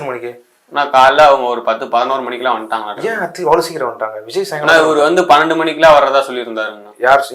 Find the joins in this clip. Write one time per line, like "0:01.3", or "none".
none